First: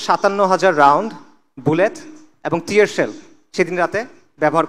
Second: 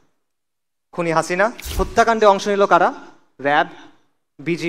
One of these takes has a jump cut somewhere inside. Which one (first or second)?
second